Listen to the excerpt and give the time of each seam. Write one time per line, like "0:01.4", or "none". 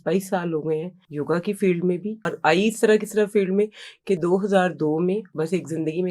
0:01.0
0:02.3
0:05.3